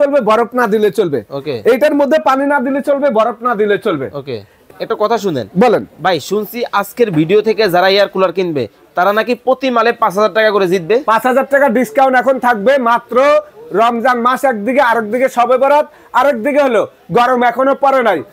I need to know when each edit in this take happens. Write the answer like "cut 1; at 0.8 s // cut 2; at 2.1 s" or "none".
cut 1; at 4.6 s